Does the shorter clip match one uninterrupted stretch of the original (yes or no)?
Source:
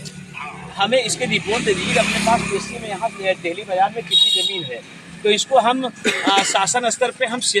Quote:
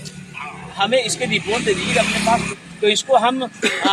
no